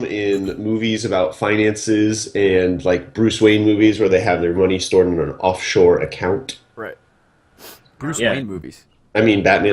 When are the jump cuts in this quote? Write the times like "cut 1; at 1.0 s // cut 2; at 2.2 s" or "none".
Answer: cut 1; at 2.8 s